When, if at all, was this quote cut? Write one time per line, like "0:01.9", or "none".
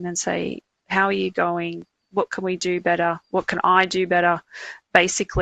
none